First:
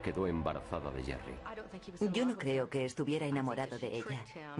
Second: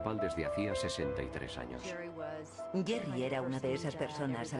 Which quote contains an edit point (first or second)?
second